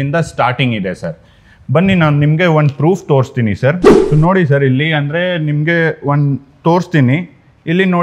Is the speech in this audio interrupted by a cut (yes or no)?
no